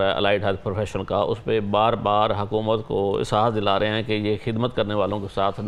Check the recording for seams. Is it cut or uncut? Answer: uncut